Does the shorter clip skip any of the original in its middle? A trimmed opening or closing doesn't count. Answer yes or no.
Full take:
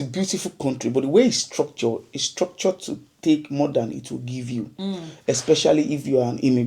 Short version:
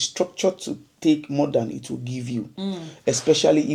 no